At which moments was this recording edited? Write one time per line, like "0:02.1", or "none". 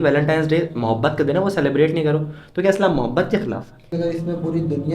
0:03.9

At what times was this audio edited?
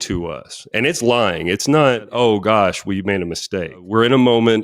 0:02.1
0:03.8

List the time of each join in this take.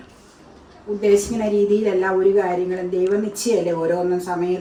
none

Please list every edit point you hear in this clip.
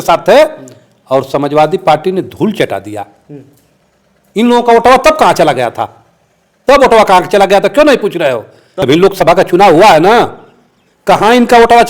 0:08.8

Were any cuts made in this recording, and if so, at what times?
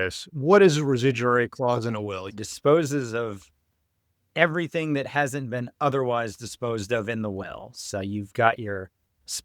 0:02.4

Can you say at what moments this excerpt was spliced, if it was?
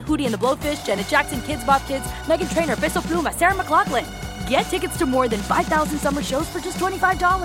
none

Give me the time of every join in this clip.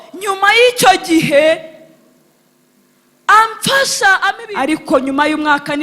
0:04.4

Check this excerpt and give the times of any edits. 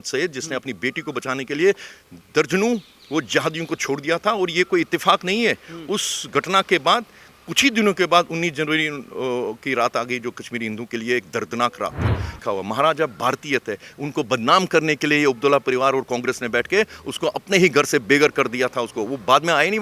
0:12.3

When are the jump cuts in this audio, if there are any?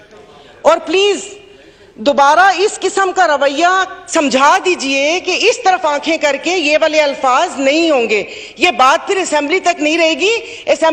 none

